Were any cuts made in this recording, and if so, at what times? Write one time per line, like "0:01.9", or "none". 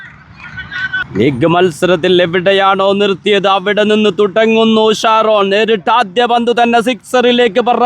0:01.1